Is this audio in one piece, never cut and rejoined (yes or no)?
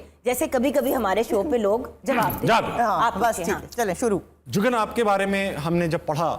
yes